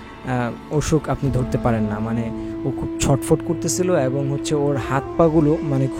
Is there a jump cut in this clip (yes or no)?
no